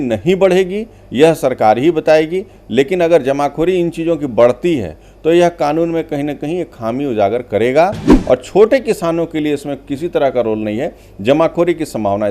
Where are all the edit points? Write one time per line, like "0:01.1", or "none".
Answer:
0:08.1